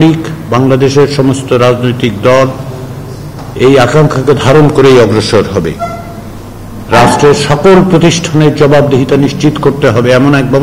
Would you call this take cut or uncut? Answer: uncut